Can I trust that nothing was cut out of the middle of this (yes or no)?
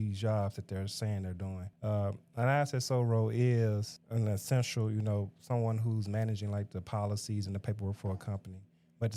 no